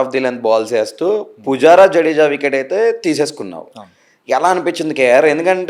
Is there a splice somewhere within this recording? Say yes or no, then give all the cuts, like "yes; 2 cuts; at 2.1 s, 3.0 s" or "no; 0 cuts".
no; 0 cuts